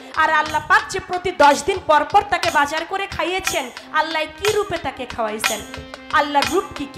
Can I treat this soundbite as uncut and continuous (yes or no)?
yes